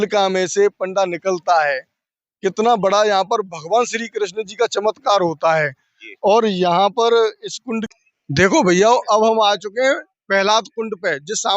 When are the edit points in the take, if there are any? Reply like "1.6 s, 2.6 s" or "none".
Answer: 7.9 s